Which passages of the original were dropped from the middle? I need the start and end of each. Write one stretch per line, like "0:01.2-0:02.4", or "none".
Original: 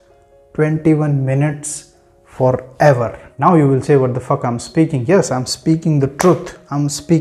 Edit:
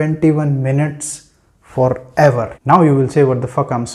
0:03.1-0:03.2